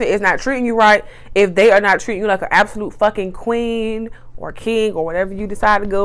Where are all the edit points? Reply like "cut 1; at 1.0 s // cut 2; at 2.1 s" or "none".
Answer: none